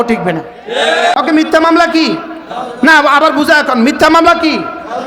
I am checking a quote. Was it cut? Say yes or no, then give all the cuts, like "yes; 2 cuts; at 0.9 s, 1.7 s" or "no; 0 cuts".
yes; 1 cut; at 1.2 s